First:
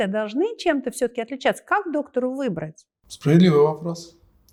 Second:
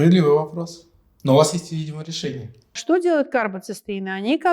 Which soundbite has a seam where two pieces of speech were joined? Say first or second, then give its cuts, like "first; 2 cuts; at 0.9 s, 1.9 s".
second; 1 cut; at 2.7 s